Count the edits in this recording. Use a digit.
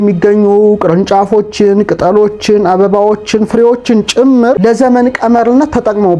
1